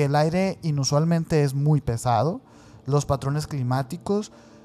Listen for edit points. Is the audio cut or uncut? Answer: uncut